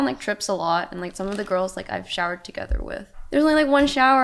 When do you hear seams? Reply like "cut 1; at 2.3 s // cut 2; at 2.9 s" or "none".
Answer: cut 1; at 3.1 s